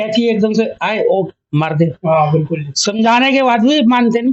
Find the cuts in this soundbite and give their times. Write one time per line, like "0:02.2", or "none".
none